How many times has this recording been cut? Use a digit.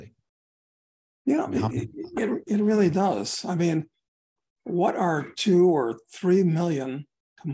0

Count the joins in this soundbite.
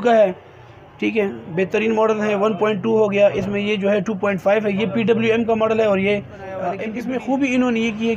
1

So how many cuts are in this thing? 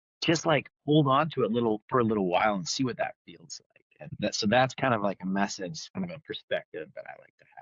2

